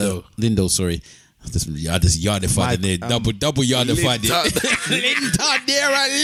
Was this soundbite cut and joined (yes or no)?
no